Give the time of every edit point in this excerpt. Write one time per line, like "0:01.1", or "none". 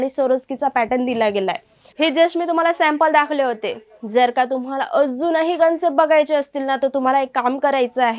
0:01.8